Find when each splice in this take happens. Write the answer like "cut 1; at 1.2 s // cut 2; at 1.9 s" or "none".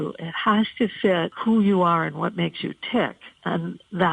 cut 1; at 1.3 s